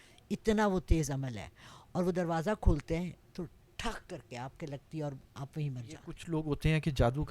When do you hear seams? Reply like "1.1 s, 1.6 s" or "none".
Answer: 6.1 s